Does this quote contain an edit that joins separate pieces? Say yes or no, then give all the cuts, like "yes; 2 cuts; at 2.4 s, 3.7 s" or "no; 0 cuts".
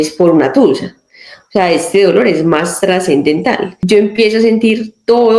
yes; 1 cut; at 3.7 s